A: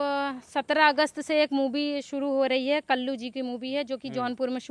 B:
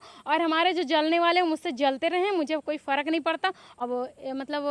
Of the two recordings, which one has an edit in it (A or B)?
B